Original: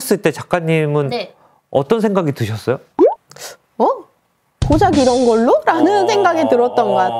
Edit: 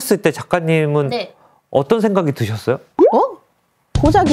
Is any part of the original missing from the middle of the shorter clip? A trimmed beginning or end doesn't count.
yes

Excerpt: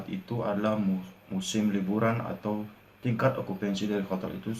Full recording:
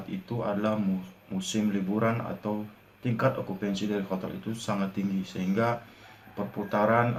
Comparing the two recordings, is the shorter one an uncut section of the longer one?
yes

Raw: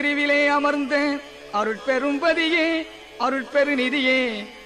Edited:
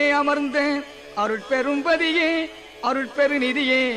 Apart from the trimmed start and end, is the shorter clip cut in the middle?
no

